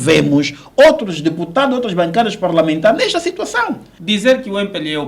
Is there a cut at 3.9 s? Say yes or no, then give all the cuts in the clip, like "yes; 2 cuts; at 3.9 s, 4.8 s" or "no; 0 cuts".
yes; 1 cut; at 3.9 s